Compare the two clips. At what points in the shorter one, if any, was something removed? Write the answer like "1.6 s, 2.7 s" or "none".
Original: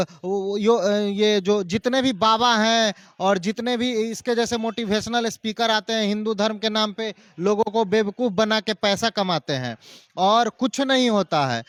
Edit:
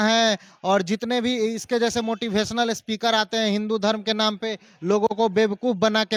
none